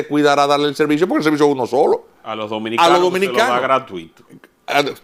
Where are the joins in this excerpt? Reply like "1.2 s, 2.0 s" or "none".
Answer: none